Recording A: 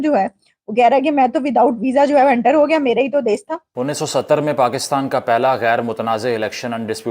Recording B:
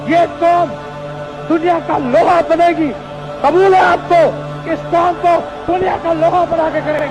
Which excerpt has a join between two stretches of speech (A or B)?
A